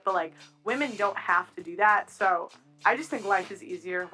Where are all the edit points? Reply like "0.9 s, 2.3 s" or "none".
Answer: 2.1 s